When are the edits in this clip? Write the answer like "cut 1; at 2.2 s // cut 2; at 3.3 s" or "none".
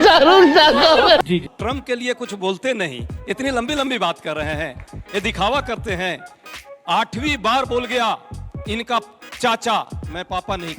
cut 1; at 1.5 s